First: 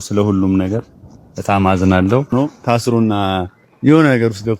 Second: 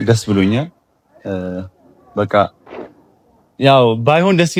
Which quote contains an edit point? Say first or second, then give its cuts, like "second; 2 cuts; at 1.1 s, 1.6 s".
first; 1 cut; at 2.5 s